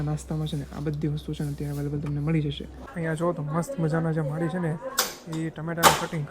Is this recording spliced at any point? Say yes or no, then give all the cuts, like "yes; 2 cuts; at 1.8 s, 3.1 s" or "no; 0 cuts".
yes; 1 cut; at 2.8 s